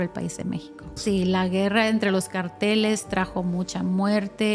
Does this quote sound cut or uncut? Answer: cut